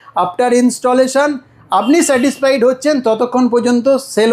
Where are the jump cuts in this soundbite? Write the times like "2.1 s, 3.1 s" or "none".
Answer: none